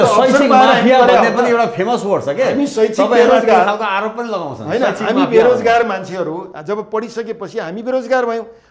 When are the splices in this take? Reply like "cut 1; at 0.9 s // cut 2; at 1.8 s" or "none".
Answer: none